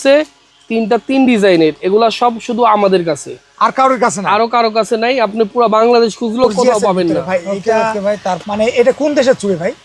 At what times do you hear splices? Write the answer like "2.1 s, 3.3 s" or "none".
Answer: 8.4 s